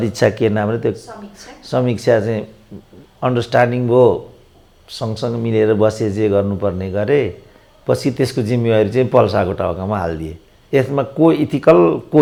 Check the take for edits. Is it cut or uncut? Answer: uncut